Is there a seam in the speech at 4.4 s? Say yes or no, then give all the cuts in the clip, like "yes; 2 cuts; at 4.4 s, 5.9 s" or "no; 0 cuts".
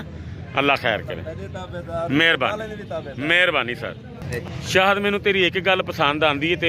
yes; 1 cut; at 4.4 s